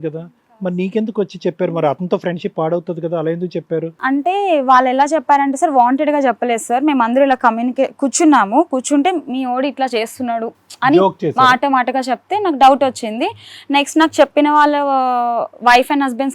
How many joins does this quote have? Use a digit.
0